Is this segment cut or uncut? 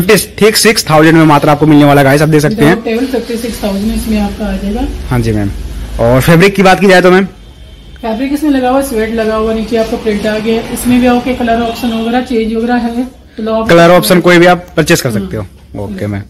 uncut